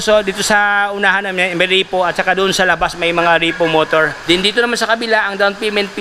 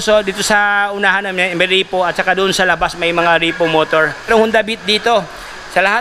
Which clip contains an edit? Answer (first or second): first